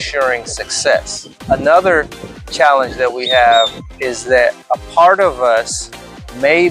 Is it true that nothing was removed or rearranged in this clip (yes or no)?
no